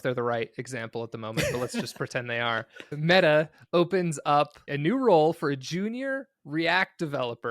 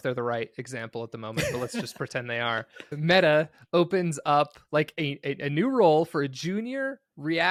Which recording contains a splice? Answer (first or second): first